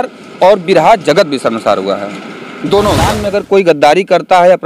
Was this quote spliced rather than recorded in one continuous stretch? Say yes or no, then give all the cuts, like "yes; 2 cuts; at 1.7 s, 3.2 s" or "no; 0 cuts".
yes; 1 cut; at 3.2 s